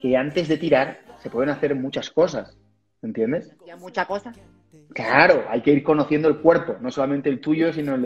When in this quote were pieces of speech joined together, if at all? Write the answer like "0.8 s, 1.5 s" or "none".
none